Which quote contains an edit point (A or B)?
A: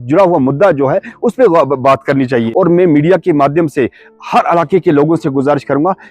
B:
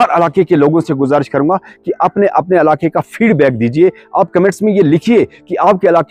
A